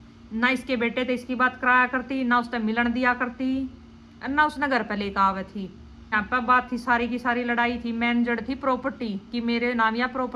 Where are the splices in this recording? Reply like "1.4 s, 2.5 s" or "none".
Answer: 6.1 s